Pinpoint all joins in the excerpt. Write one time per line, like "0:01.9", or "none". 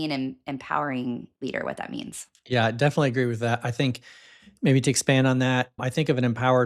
none